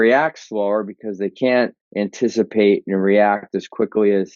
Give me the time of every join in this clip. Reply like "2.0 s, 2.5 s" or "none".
1.8 s